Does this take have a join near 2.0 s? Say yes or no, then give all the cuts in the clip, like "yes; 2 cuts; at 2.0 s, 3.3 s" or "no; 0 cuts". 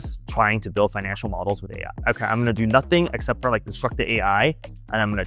yes; 1 cut; at 2.0 s